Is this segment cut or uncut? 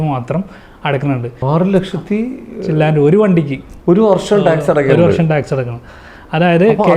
cut